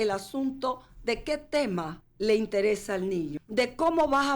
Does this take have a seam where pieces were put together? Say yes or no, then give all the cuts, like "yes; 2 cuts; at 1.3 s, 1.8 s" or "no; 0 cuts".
yes; 2 cuts; at 2.0 s, 3.4 s